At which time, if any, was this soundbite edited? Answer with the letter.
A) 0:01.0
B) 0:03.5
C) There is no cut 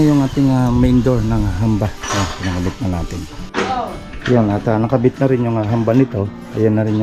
B